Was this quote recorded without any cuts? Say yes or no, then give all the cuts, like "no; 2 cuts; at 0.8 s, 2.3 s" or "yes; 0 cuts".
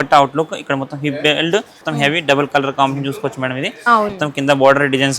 no; 2 cuts; at 1.8 s, 4.1 s